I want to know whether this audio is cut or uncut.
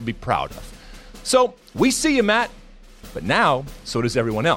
uncut